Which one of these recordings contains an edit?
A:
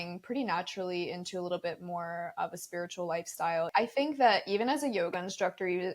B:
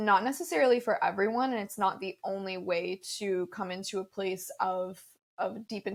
A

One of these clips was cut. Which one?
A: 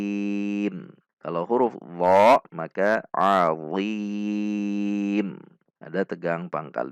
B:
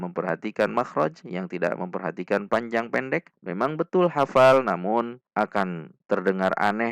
B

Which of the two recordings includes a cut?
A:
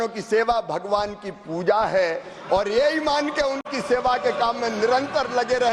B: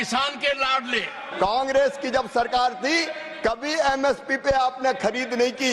B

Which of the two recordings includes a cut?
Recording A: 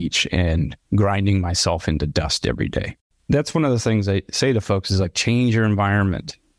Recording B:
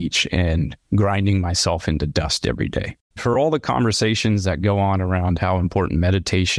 B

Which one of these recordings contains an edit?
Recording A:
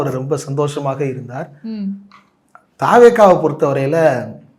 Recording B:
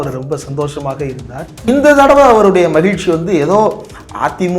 B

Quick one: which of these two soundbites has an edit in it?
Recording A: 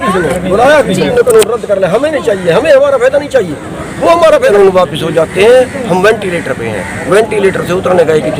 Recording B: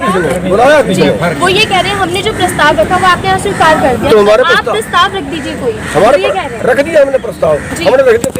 A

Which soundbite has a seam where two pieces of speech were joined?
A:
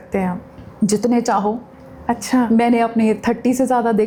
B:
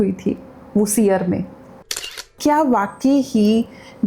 B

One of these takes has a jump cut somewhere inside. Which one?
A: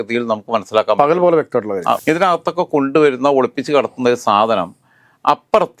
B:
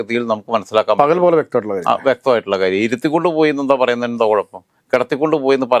A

